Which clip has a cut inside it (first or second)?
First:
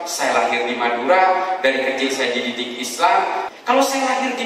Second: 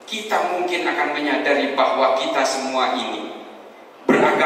first